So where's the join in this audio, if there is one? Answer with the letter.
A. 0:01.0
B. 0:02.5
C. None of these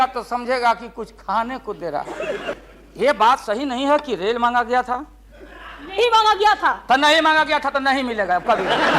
B